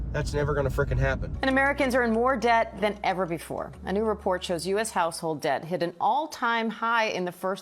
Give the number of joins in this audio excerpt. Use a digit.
1